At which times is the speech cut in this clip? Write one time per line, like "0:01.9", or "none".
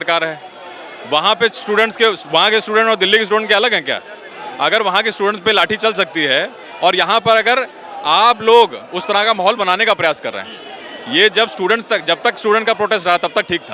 none